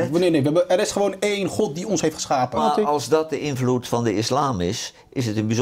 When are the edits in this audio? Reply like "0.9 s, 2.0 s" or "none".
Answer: 2.6 s